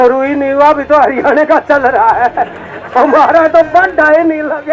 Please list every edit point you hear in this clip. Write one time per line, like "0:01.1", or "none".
none